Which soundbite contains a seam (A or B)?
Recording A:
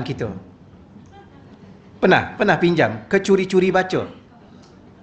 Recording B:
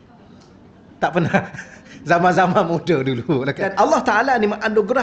B